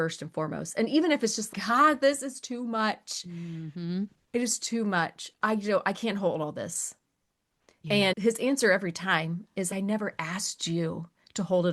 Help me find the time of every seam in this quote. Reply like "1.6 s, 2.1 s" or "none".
9.7 s